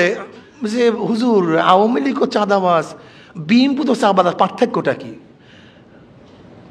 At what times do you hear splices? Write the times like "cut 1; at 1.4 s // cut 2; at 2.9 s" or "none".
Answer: none